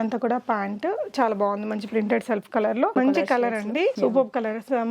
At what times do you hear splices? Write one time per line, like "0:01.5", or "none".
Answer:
0:02.9
0:04.0